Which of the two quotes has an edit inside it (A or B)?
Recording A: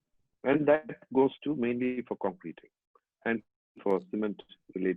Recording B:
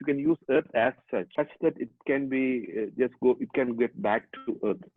B